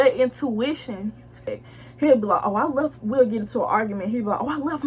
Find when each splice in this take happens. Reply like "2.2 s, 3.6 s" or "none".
1.4 s